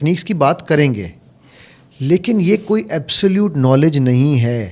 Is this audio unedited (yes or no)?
yes